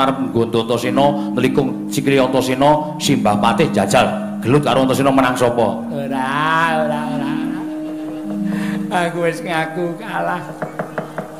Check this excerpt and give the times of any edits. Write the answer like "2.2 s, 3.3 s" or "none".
1.8 s